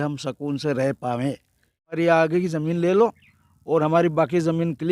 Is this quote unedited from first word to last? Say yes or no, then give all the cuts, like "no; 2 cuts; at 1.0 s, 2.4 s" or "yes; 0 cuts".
no; 1 cut; at 2.0 s